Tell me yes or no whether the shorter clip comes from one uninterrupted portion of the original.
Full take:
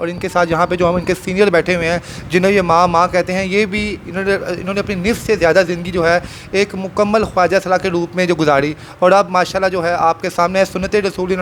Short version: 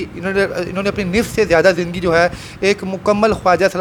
yes